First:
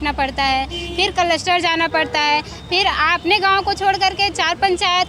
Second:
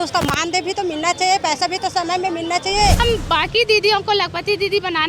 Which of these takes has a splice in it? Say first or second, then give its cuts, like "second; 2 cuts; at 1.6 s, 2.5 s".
second; 1 cut; at 3.0 s